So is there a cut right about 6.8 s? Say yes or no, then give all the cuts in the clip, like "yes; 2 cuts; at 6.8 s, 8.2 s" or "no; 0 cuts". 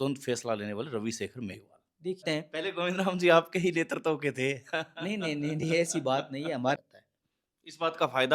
yes; 2 cuts; at 2.2 s, 6.8 s